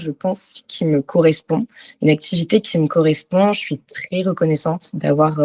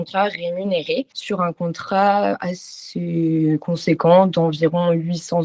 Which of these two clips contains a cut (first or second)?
second